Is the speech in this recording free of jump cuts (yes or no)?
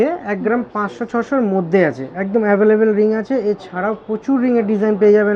yes